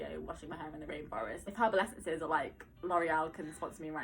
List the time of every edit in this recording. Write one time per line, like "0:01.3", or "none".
0:01.4